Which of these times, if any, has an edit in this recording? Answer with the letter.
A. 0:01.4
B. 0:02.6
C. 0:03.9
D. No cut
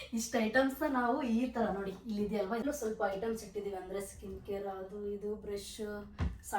B